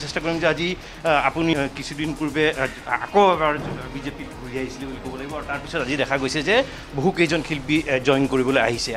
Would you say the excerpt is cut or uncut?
cut